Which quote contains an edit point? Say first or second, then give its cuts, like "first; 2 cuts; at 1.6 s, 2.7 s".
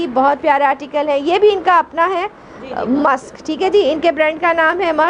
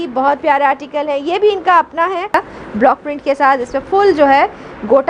second; 1 cut; at 2.3 s